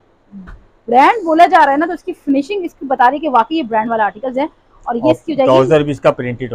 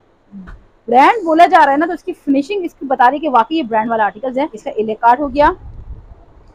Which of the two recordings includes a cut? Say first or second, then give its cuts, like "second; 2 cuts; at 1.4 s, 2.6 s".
second; 1 cut; at 4.6 s